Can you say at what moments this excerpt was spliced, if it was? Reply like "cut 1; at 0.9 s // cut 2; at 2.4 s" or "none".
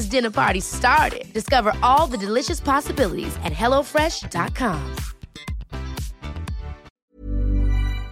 cut 1; at 6.9 s